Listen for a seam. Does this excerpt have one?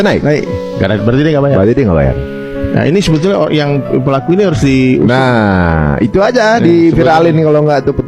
no; 0 cuts

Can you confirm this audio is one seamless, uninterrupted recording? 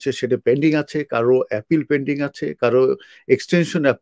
yes; 0 cuts

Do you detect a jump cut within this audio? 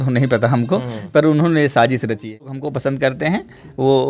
yes; 1 cut; at 2.5 s

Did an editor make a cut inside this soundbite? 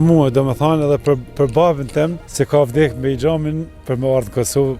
yes; 1 cut; at 2.2 s

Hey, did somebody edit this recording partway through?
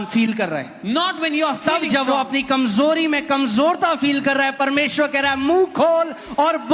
no; 0 cuts

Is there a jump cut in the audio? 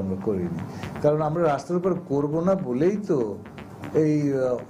no; 0 cuts

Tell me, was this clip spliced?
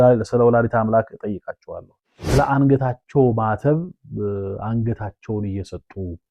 yes; 1 cut; at 1.9 s

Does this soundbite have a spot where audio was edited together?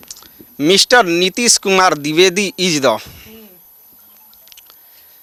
no; 0 cuts

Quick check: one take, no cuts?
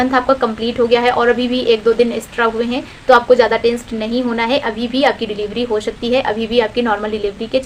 yes; 0 cuts

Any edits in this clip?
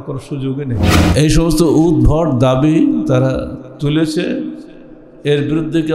yes; 1 cut; at 0.9 s

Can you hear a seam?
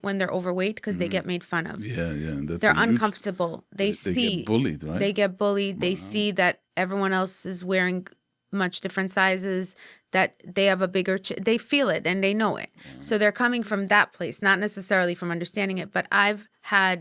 no; 0 cuts

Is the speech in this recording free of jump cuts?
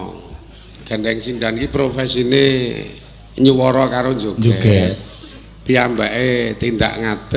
yes; 0 cuts

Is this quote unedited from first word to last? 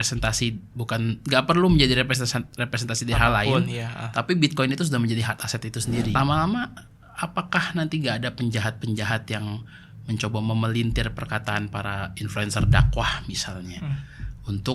no; 1 cut; at 6.1 s

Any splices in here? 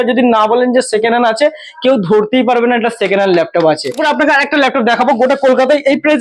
yes; 1 cut; at 4.0 s

